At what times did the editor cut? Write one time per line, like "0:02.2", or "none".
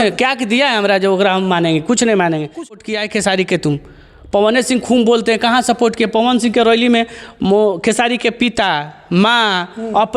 0:02.6